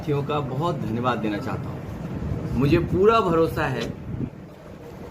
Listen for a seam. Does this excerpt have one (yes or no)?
yes